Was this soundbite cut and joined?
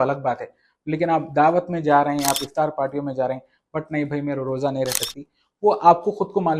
no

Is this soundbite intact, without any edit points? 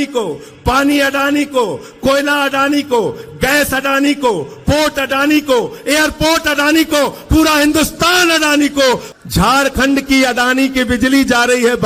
no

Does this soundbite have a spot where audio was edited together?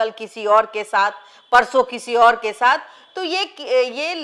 no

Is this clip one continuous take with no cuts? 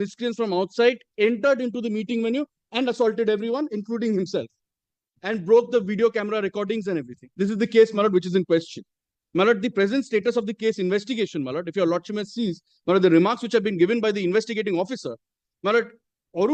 no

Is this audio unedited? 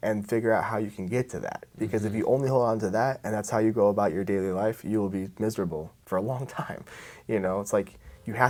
yes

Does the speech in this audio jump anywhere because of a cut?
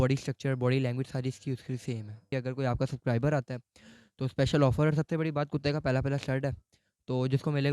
yes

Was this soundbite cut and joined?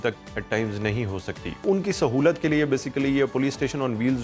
yes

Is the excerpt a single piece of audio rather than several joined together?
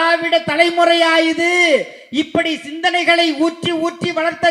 yes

